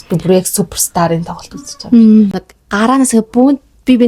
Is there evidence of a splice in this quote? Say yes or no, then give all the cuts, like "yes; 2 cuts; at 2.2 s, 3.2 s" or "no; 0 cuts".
yes; 1 cut; at 2.5 s